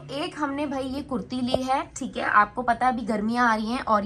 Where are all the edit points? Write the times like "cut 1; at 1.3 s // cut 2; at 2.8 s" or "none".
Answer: none